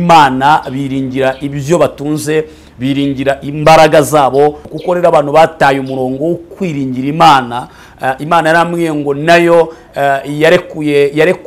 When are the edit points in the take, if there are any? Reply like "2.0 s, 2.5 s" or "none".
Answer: 4.7 s